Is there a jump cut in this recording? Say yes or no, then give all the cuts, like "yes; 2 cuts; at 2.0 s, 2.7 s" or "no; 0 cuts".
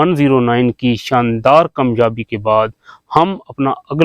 no; 0 cuts